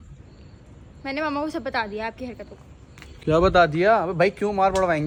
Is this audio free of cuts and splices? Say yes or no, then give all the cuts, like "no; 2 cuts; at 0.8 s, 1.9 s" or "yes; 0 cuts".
yes; 0 cuts